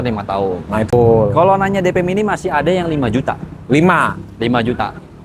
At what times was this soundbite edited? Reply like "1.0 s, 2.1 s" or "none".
0.9 s